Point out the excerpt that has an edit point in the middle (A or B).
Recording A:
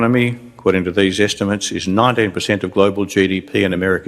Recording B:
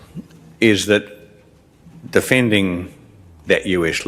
A